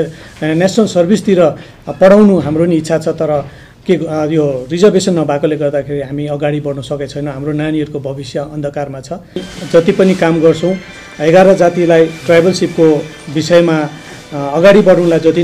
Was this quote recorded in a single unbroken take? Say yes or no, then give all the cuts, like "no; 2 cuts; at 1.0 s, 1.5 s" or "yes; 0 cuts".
no; 1 cut; at 9.5 s